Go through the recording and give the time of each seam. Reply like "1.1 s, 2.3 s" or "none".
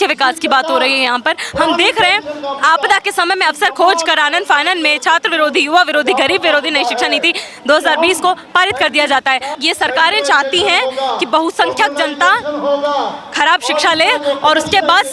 9.5 s